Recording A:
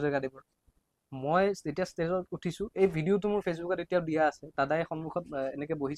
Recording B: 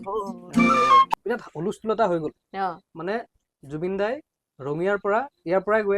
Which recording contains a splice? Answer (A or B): B